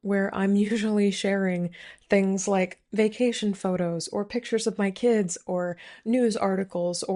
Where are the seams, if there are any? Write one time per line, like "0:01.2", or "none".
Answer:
none